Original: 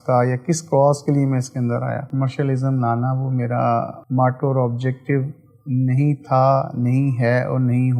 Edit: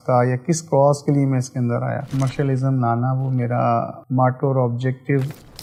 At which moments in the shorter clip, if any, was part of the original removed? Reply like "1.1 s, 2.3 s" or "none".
none